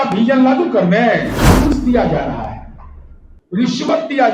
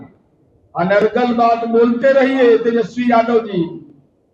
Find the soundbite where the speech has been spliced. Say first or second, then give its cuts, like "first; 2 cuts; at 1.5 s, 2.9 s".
first; 1 cut; at 1.4 s